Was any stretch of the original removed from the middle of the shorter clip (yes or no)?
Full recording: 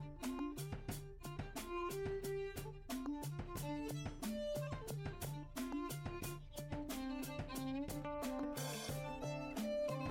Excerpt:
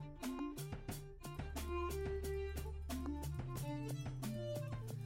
no